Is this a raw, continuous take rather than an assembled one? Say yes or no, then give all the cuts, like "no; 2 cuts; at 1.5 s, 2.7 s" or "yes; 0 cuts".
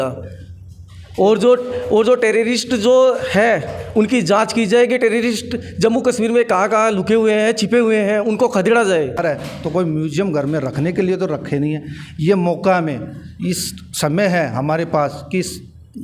no; 1 cut; at 9.2 s